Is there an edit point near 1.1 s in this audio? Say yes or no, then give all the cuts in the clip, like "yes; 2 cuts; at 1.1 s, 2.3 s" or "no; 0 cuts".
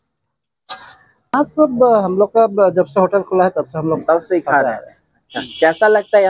yes; 1 cut; at 1.1 s